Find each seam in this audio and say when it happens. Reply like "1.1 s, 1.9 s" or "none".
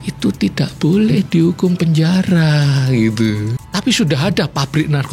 3.5 s